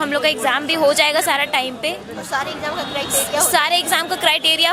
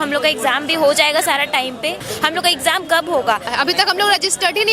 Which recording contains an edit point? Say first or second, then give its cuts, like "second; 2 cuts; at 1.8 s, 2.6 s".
second; 2 cuts; at 2.1 s, 3.5 s